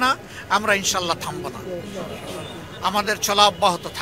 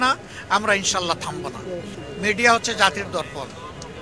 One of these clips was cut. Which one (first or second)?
second